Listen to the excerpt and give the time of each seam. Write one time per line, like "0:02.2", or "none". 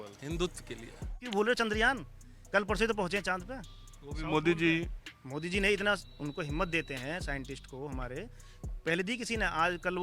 0:01.2